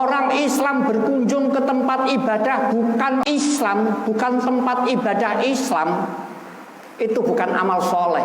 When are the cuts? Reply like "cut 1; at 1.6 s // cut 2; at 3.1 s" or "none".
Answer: cut 1; at 3.2 s